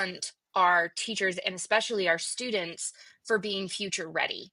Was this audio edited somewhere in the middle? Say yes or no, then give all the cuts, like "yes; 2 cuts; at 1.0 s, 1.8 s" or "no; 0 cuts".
no; 0 cuts